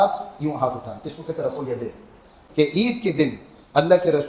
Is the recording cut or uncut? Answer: cut